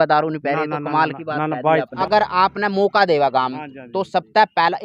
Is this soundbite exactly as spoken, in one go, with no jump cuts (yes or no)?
no